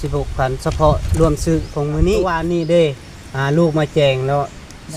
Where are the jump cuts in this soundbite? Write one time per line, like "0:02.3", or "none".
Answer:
0:02.3